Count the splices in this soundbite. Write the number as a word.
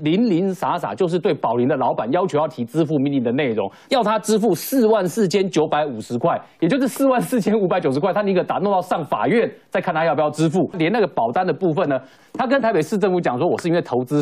three